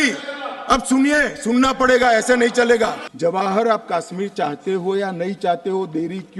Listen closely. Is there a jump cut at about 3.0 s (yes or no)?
yes